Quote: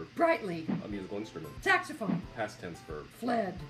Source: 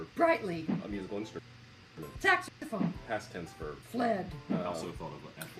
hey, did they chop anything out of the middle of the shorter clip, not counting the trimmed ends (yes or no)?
yes